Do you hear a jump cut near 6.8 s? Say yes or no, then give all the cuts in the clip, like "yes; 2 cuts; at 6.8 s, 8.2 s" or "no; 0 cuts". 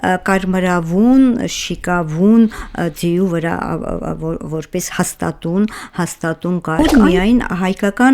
yes; 1 cut; at 6.8 s